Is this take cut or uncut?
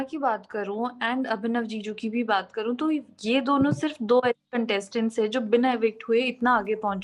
uncut